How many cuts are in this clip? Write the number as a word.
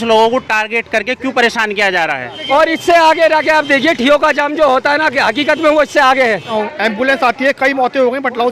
two